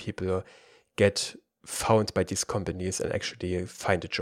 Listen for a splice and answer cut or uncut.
uncut